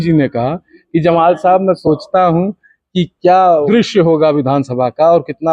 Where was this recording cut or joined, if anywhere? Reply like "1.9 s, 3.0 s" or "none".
3.7 s